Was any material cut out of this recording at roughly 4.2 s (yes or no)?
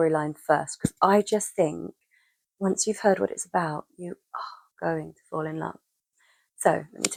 no